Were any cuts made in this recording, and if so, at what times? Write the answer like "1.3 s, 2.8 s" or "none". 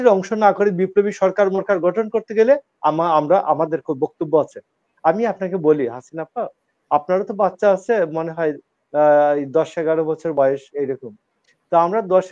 none